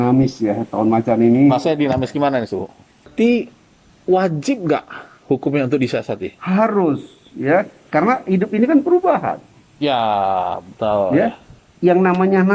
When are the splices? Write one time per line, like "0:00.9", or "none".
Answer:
0:03.1

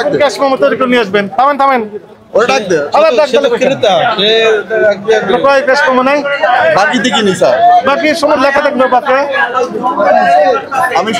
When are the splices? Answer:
none

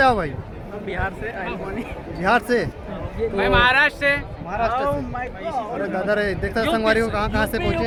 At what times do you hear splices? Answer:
none

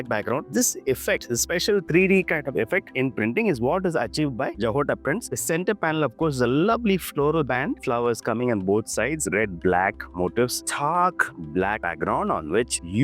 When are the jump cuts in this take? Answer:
0:05.3
0:10.6

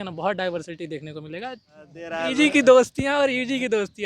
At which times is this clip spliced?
0:02.2

